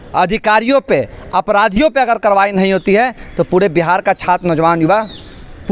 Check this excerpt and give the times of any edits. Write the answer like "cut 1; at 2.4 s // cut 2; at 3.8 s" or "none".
none